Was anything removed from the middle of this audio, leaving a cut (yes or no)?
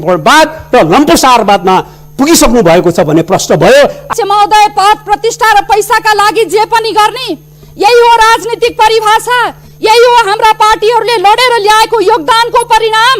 yes